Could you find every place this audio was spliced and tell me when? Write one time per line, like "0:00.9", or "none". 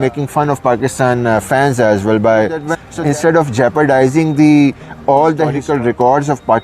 0:02.7
0:05.6